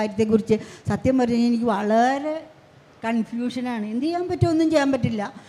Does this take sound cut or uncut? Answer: uncut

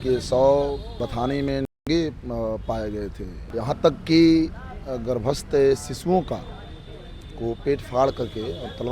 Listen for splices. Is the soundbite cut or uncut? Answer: cut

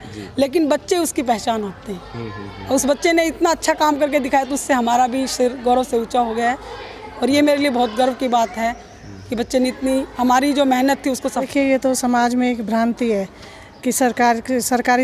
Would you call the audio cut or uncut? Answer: cut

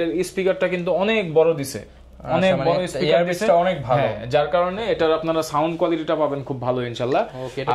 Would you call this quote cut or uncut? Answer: uncut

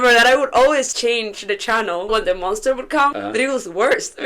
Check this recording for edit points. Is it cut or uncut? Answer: cut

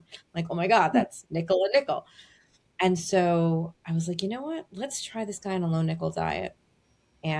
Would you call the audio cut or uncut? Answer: uncut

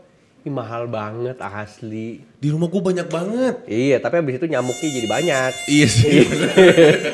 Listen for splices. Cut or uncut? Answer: uncut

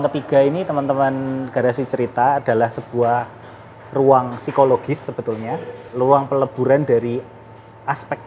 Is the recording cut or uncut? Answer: cut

